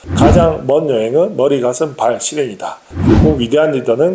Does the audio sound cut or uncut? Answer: uncut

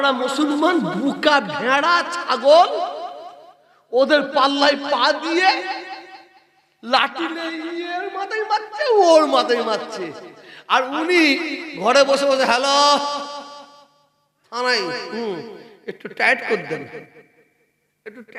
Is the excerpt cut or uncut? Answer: uncut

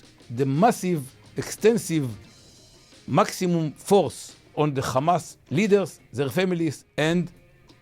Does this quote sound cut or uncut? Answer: cut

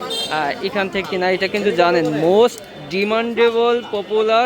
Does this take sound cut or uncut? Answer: cut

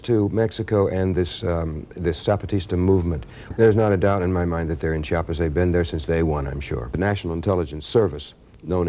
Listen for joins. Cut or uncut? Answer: cut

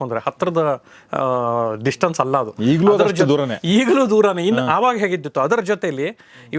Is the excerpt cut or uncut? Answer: uncut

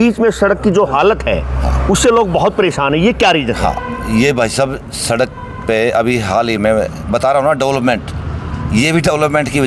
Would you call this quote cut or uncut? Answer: uncut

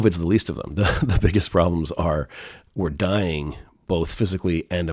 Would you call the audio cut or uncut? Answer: uncut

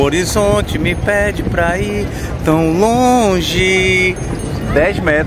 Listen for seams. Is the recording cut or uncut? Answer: uncut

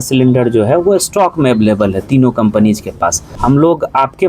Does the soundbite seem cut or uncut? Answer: cut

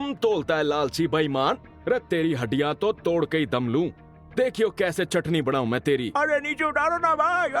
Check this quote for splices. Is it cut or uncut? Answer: cut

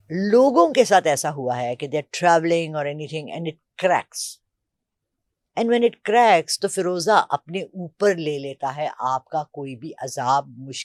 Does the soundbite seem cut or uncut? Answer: uncut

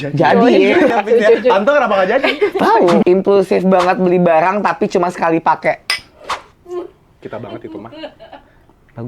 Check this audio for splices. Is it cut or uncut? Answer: cut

